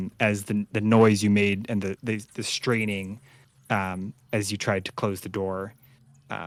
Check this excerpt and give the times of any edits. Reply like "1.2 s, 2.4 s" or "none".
none